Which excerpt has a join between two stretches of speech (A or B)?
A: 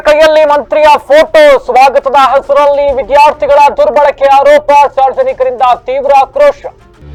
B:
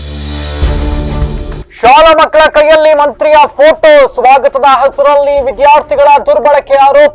B